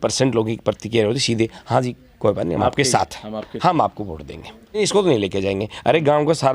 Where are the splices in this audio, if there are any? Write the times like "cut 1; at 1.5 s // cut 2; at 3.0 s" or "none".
cut 1; at 4.8 s

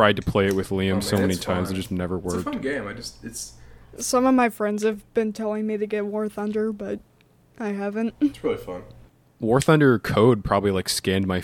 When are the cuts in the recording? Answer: none

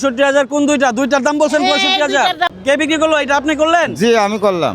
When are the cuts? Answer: cut 1; at 2.5 s

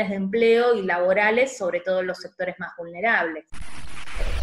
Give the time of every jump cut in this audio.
cut 1; at 3.4 s

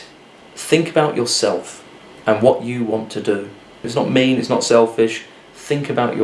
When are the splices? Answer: cut 1; at 3.9 s

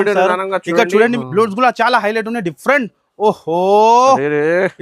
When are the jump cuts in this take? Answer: cut 1; at 1.2 s

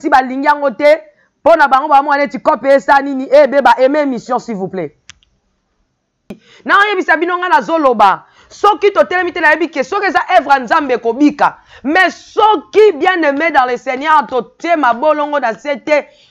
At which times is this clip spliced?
cut 1; at 6.5 s

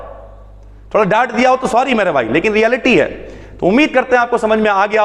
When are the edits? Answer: none

